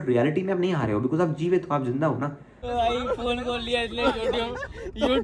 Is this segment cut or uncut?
cut